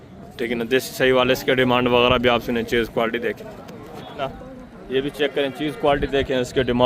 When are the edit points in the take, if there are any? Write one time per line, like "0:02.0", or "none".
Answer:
0:04.3